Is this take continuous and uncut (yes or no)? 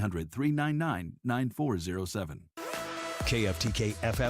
no